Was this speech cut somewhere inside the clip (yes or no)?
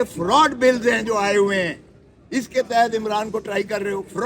no